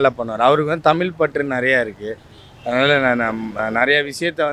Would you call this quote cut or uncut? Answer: uncut